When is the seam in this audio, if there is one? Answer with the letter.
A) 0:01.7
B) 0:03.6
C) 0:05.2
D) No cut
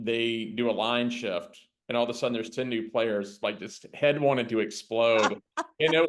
D